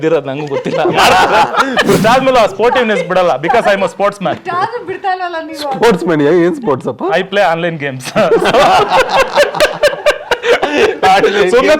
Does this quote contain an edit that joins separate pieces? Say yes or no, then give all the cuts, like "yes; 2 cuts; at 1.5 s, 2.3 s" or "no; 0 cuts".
yes; 1 cut; at 2.0 s